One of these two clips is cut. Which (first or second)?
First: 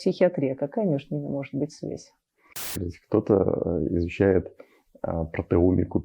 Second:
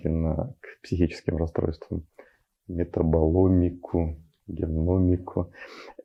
first